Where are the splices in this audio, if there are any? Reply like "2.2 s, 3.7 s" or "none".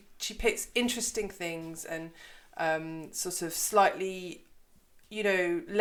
none